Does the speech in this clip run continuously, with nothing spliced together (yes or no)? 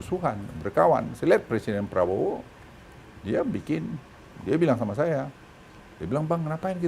yes